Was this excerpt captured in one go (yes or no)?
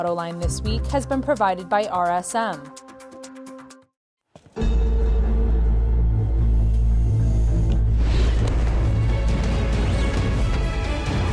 no